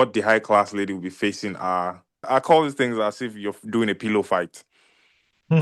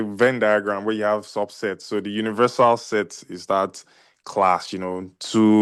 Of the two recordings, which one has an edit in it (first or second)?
first